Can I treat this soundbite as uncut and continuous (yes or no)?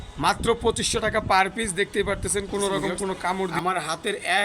no